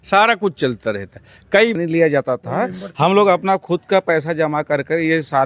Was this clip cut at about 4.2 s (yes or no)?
no